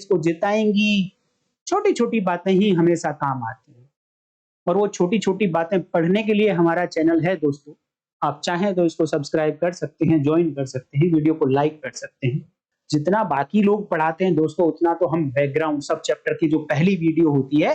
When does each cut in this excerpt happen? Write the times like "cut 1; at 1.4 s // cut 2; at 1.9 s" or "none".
cut 1; at 12.7 s